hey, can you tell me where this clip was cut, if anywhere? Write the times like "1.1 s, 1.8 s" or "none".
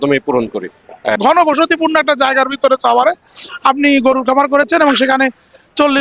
1.1 s